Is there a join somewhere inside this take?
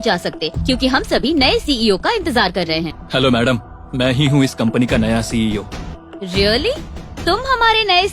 yes; 2 cuts; at 3.0 s, 5.9 s

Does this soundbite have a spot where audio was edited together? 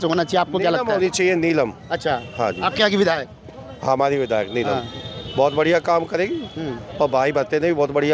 no; 0 cuts

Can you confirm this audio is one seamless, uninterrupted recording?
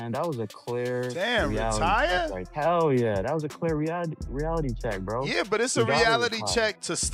yes; 0 cuts

